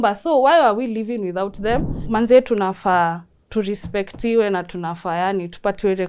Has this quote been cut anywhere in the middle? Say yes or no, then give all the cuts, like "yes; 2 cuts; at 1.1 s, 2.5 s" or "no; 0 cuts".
yes; 1 cut; at 2.0 s